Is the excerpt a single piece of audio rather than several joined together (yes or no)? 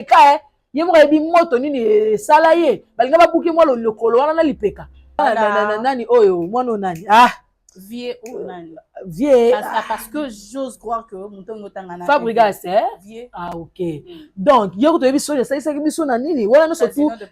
no